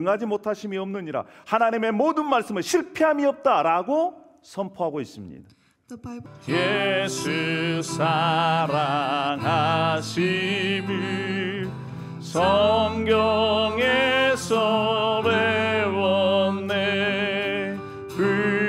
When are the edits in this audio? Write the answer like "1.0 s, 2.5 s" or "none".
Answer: 6.2 s